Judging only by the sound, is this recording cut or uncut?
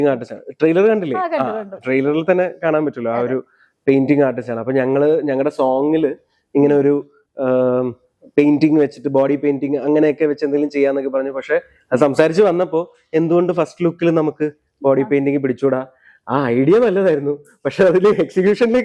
uncut